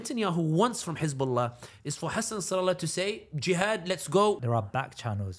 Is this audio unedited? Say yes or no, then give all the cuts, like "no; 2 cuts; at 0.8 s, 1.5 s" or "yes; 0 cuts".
no; 1 cut; at 4.4 s